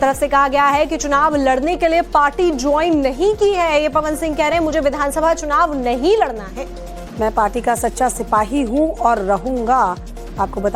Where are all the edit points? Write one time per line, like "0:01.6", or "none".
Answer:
0:09.1